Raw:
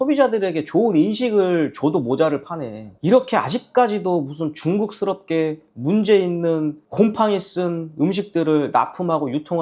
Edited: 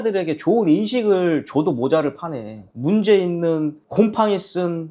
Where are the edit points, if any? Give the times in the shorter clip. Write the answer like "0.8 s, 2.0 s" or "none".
2.6 s